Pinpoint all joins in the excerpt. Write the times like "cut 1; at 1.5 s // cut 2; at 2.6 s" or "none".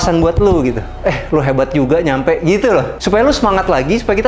cut 1; at 0.9 s // cut 2; at 3.0 s